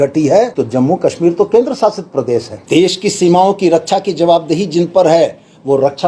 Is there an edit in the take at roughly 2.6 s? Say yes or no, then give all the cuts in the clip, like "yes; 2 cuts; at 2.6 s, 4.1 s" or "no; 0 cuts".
yes; 1 cut; at 2.6 s